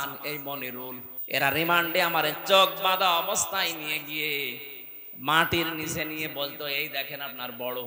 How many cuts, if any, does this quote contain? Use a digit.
1